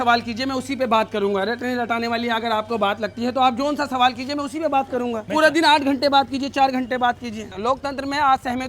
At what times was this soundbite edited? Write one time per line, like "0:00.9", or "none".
0:05.2
0:07.5